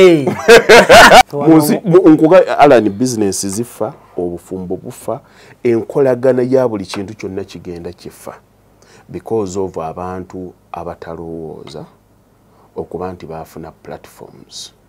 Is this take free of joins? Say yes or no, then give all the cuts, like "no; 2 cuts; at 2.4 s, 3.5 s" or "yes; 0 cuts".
no; 1 cut; at 1.2 s